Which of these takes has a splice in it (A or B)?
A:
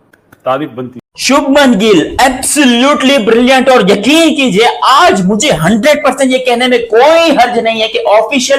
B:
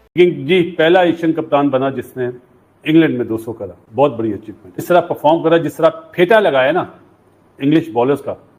A